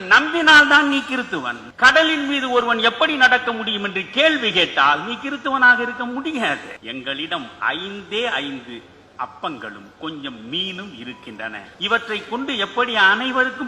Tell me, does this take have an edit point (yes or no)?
yes